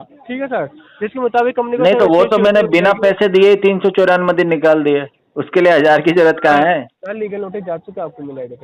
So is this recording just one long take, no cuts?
no; 1 cut; at 7.0 s

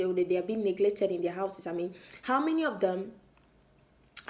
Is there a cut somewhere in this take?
no; 0 cuts

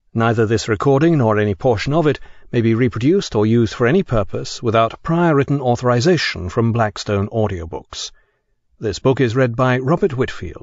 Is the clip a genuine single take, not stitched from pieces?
yes; 0 cuts

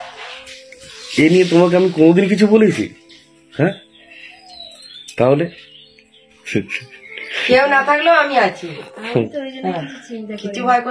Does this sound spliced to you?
yes; 1 cut; at 6.3 s

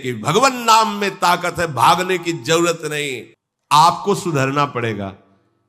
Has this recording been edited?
yes; 1 cut; at 3.2 s

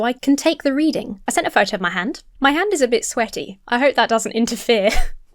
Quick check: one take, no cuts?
no; 2 cuts; at 1.1 s, 2.3 s

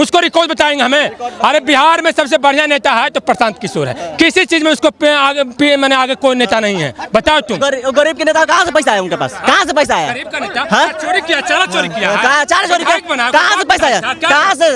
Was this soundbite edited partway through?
no; 0 cuts

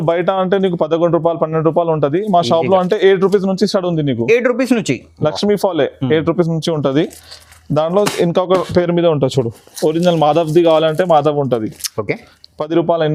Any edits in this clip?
no; 0 cuts

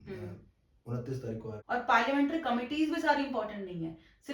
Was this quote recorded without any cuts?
no; 1 cut; at 1.6 s

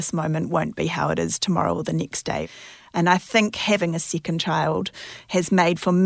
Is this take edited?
yes; 2 cuts; at 2.5 s, 3.8 s

